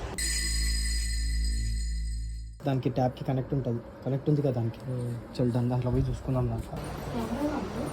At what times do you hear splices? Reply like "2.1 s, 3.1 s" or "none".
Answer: 2.4 s